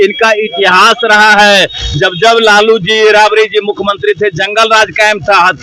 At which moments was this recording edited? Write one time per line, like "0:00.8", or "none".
none